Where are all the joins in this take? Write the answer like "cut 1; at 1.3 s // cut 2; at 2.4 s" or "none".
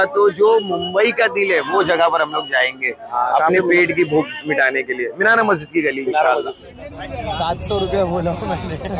cut 1; at 6.9 s